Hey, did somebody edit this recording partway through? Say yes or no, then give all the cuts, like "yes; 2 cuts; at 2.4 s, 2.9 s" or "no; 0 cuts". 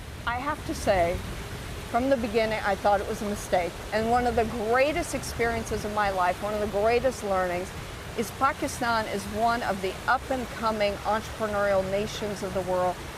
yes; 1 cut; at 2.5 s